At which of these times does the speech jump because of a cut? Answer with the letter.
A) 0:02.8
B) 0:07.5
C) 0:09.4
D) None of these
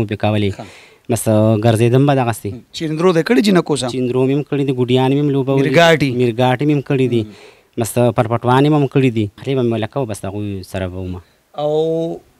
C